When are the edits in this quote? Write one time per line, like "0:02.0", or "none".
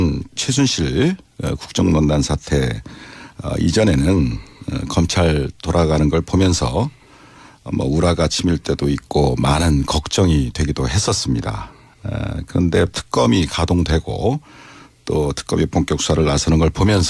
0:05.1